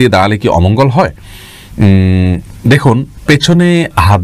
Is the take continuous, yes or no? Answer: yes